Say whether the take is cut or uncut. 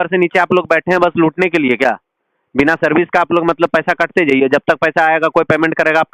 uncut